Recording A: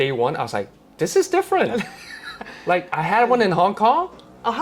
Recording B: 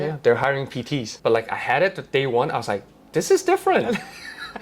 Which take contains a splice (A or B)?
B